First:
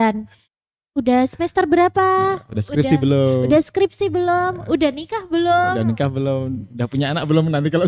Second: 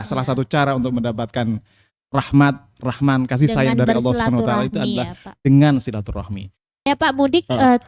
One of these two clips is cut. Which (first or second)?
second